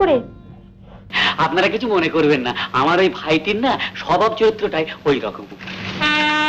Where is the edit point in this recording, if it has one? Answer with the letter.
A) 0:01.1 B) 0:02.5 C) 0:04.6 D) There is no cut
A